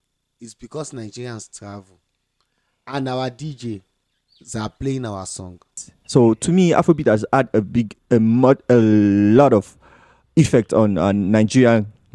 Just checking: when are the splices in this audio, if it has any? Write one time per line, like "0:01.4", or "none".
0:05.9